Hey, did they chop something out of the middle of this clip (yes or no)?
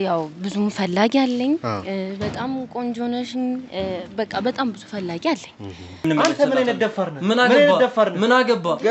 yes